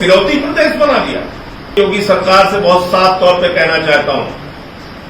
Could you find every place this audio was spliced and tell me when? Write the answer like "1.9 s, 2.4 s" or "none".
1.8 s